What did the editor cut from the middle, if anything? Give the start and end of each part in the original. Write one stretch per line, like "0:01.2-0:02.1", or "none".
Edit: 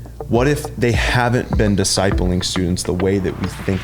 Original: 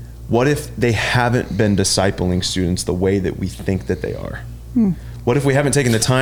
none